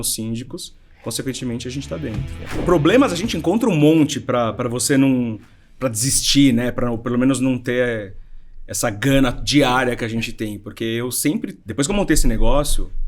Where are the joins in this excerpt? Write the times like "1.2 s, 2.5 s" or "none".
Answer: 2.2 s